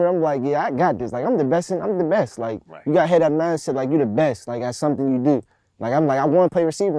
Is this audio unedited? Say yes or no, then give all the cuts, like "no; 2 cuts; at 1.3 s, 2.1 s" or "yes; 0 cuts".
yes; 0 cuts